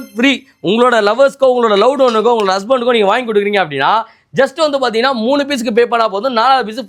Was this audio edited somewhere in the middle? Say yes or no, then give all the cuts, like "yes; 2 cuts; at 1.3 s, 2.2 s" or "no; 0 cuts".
no; 0 cuts